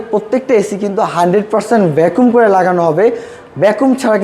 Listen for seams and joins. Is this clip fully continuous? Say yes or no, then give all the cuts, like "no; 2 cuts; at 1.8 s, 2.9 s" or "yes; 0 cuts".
yes; 0 cuts